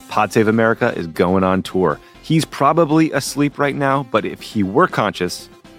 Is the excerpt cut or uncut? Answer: uncut